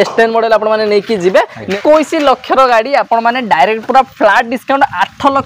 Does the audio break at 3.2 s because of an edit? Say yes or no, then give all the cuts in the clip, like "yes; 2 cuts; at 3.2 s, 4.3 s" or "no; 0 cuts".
no; 1 cut; at 1.7 s